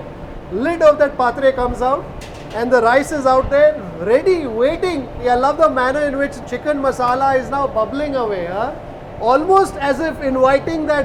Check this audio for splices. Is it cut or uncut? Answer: uncut